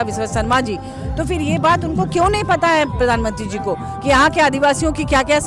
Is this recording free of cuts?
yes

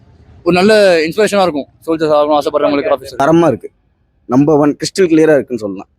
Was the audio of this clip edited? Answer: yes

